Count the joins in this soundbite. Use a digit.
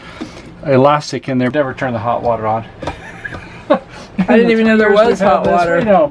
1